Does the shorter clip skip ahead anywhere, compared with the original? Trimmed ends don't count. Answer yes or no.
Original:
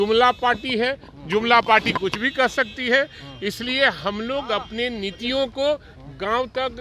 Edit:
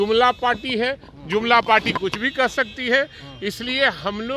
no